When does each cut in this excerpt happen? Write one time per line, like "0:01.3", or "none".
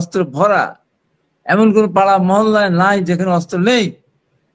none

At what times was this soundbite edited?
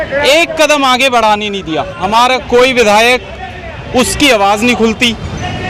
0:02.0

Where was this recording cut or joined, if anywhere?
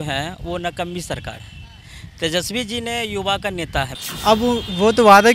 0:04.0

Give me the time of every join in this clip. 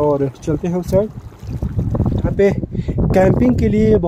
0:02.3

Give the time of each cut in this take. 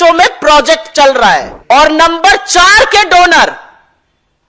0:01.5

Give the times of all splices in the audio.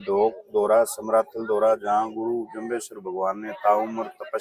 none

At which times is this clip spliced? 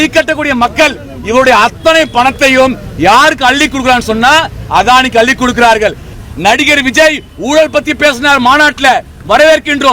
0:06.1

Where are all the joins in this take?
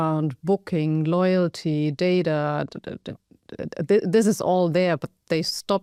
none

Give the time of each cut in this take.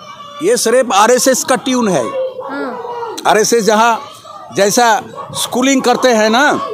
none

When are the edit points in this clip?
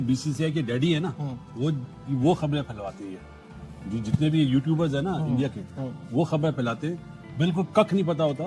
none

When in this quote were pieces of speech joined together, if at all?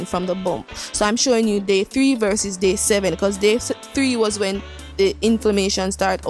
none

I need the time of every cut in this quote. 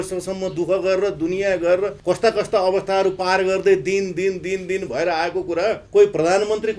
0:02.0
0:05.8

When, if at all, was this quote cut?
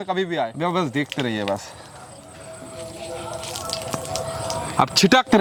none

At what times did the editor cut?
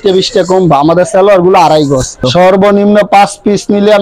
0:02.2

